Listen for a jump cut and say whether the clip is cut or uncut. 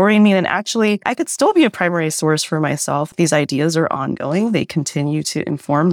cut